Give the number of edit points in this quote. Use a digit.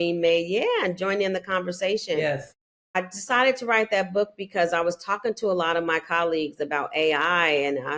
1